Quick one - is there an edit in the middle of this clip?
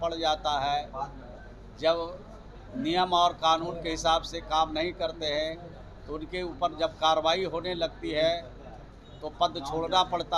no; 0 cuts

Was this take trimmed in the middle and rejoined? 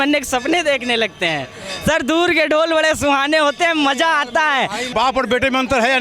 yes; 1 cut; at 4.9 s

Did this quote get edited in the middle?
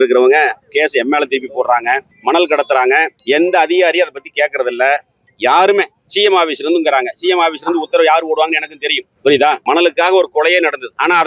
yes; 3 cuts; at 2.1 s, 6.1 s, 9.6 s

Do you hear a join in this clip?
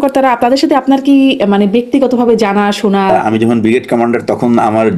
yes; 1 cut; at 3.2 s

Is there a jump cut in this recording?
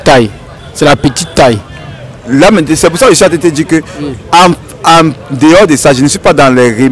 no; 0 cuts

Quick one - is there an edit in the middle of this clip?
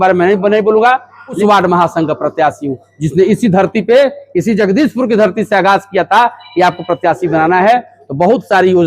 yes; 1 cut; at 1.4 s

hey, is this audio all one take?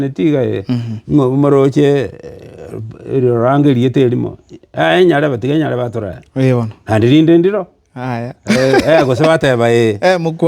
yes; 0 cuts

